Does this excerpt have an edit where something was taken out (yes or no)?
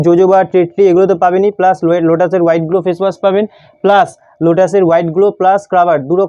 no